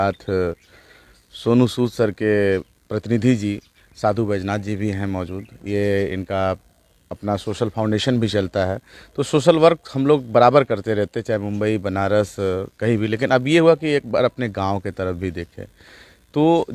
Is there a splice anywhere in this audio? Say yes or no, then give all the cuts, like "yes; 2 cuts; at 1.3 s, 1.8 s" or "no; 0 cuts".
no; 0 cuts